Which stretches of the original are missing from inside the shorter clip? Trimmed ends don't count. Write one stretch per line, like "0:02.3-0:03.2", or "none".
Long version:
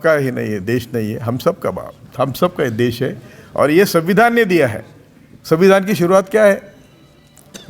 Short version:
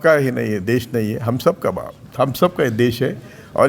none